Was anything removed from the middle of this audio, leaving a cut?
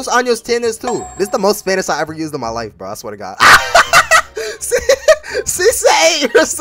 no; 0 cuts

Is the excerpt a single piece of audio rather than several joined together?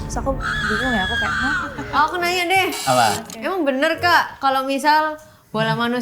no; 1 cut; at 1.8 s

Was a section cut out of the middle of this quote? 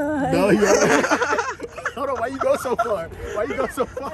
no; 0 cuts

